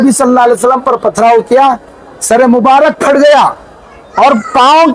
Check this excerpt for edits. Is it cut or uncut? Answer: uncut